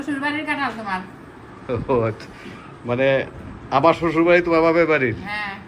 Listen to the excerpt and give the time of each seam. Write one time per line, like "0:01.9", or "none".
none